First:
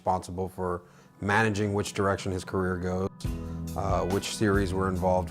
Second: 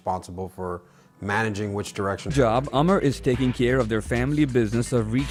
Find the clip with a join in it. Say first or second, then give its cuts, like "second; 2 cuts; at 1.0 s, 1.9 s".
first; 1 cut; at 2.3 s